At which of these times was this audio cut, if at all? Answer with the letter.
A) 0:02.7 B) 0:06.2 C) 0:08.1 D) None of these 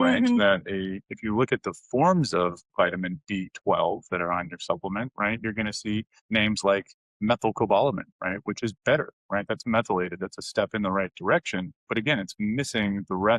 B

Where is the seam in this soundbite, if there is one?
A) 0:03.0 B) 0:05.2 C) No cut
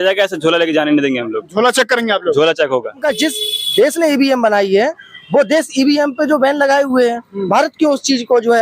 A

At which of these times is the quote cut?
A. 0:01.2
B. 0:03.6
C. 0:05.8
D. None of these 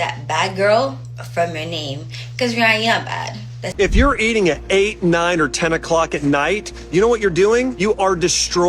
B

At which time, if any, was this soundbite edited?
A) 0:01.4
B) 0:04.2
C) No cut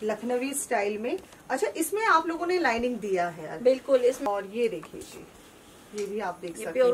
B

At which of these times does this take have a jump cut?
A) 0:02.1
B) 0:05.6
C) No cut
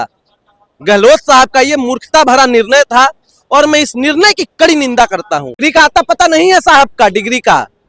B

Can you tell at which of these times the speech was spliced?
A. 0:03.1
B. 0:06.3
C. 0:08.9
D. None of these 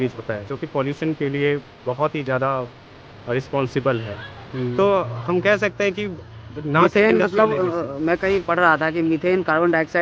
D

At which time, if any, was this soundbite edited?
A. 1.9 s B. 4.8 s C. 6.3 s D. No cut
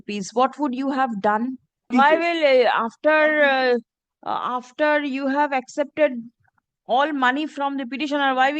A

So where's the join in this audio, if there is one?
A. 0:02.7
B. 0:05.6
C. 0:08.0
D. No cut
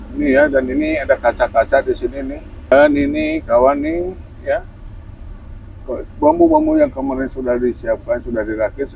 A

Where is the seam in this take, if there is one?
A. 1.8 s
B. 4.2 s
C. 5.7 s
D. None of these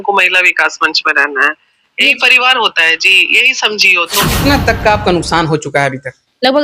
B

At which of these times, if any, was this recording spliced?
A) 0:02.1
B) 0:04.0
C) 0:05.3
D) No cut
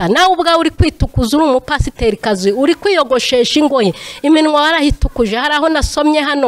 D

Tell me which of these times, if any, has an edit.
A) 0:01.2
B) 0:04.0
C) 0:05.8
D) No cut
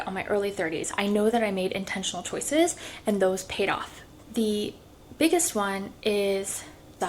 B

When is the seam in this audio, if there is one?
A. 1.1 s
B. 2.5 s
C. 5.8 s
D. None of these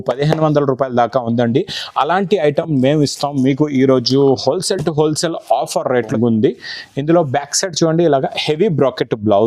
C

